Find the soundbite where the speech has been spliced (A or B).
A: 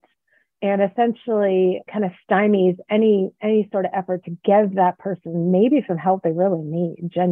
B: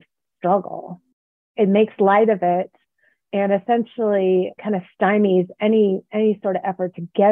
B